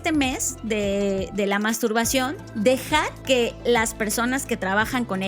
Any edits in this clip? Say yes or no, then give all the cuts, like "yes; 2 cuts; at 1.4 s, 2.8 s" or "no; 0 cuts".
yes; 2 cuts; at 2.4 s, 3.1 s